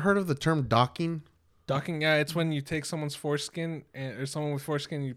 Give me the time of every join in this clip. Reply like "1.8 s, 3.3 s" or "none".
none